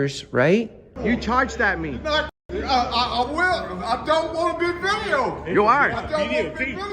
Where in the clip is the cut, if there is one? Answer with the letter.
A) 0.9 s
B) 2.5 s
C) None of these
A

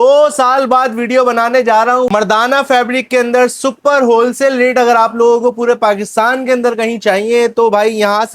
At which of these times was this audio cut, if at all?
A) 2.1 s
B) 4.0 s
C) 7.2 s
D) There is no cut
A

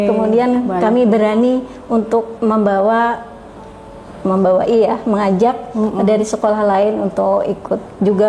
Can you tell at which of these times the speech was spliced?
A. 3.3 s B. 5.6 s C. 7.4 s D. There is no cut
D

